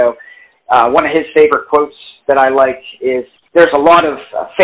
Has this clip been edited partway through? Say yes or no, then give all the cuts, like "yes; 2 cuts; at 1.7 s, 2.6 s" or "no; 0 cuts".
yes; 1 cut; at 3.4 s